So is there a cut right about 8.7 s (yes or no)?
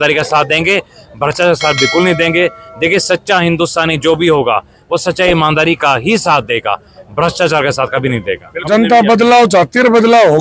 yes